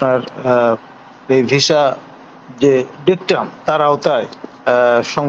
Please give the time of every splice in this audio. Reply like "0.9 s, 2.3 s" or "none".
none